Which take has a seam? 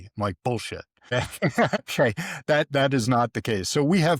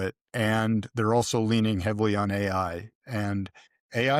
first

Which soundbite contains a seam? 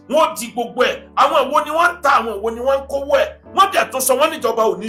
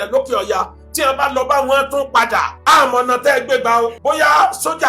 second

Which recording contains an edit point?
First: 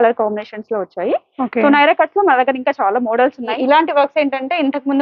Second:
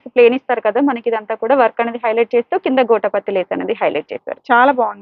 first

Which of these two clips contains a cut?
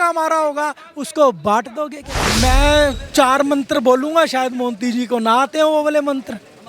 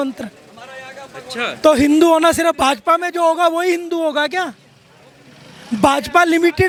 first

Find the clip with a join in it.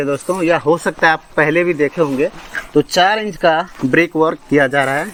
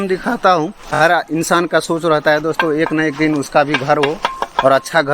second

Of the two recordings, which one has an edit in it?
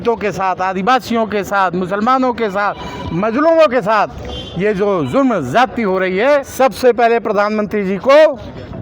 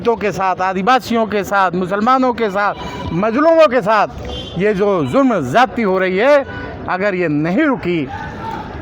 first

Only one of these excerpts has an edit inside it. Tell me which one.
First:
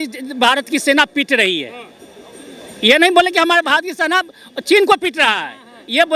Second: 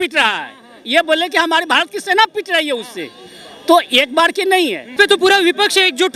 second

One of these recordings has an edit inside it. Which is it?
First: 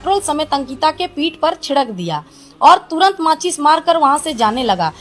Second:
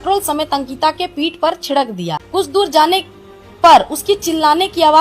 second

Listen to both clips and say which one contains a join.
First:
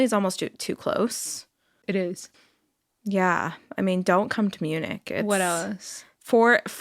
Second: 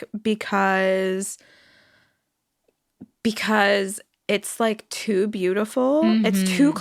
first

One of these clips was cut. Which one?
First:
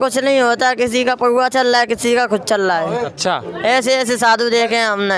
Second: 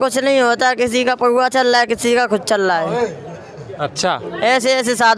first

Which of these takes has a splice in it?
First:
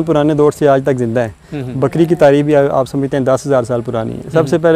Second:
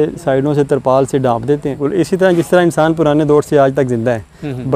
second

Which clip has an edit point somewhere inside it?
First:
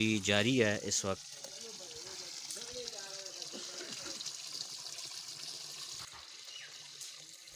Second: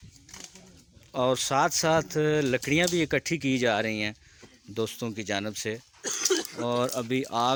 first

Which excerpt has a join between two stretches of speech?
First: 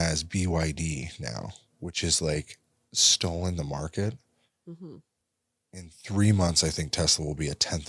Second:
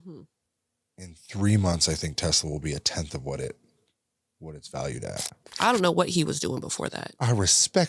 second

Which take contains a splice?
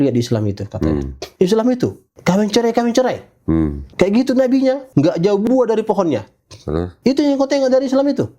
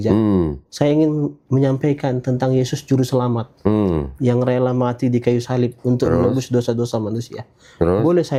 first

